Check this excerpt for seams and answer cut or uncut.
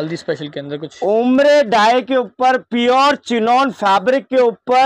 uncut